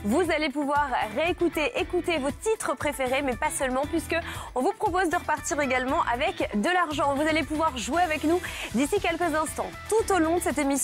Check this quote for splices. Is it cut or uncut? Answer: uncut